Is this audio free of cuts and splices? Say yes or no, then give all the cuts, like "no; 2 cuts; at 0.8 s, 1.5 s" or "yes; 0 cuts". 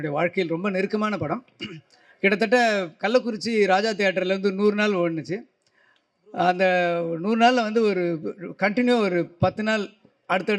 yes; 0 cuts